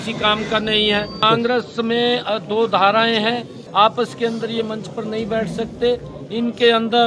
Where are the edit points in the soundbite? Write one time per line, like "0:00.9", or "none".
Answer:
0:01.2
0:03.6